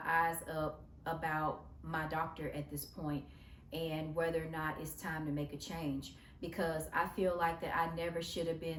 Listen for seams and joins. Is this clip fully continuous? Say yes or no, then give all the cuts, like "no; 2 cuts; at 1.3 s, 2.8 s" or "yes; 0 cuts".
yes; 0 cuts